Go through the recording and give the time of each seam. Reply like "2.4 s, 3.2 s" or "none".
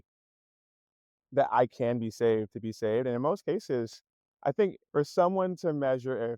4.8 s